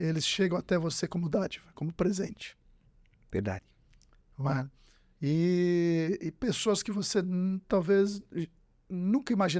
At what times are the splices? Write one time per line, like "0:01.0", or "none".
none

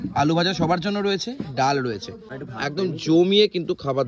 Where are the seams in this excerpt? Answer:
none

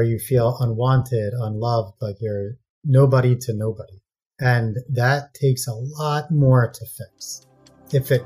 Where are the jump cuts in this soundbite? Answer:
none

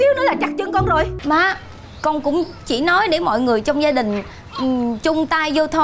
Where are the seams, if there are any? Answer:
0:01.2

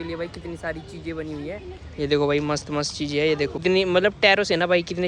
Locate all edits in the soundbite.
0:03.6

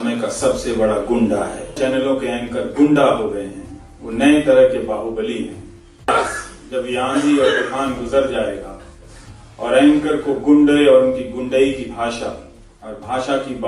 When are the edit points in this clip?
0:01.8
0:06.1

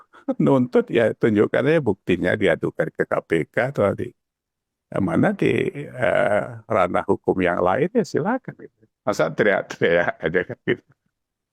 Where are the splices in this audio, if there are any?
none

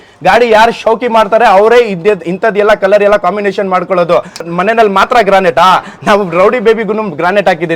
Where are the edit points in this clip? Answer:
0:04.4

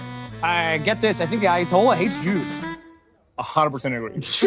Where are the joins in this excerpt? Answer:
none

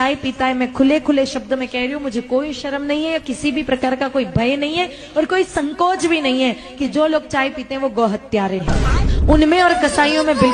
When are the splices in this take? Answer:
none

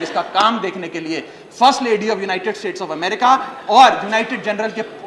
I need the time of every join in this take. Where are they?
none

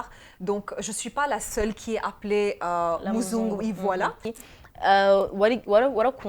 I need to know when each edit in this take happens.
0:04.4

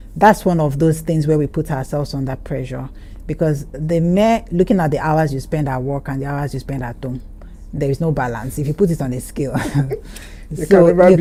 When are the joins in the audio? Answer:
none

